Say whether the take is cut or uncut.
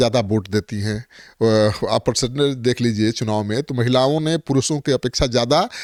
uncut